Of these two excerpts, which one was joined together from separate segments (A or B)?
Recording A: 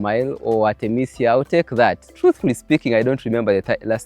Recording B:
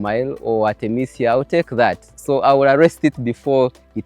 A